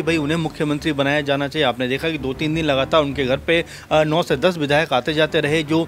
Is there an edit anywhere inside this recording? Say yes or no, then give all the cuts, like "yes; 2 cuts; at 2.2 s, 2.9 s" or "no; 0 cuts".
no; 0 cuts